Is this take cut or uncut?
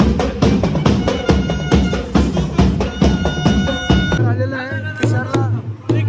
cut